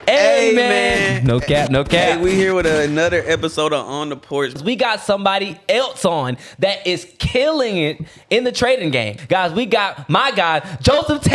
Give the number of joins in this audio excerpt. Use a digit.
2